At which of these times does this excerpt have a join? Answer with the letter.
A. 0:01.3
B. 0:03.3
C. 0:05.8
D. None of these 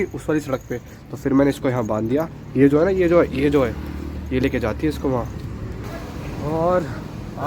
C